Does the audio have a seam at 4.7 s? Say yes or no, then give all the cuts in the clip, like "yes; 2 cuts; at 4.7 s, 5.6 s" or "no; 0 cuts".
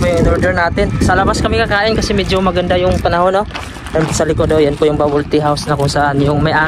no; 1 cut; at 1.0 s